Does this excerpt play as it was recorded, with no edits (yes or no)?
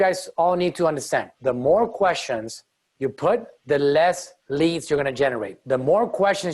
no